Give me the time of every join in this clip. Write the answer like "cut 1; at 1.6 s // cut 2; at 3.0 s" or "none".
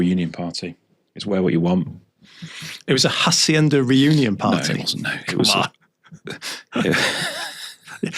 none